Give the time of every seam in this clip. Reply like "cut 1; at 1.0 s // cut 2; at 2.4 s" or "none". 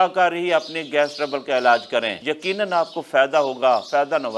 cut 1; at 2.2 s